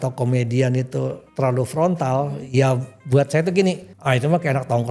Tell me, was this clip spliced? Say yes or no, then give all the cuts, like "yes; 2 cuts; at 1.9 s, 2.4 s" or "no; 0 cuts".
yes; 2 cuts; at 1.2 s, 3.9 s